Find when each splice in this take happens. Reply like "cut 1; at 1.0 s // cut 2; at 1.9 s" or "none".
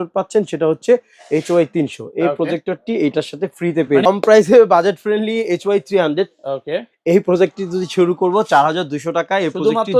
cut 1; at 4.1 s